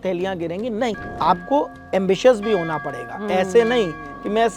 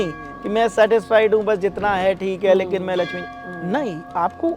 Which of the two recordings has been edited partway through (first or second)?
first